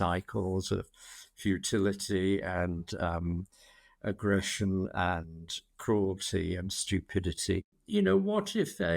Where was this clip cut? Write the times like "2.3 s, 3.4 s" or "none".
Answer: 7.7 s